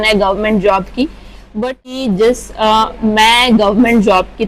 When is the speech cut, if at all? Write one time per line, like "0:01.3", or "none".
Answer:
0:01.9